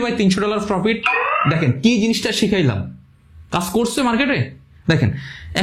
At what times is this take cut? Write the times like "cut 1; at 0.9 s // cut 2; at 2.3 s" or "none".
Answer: none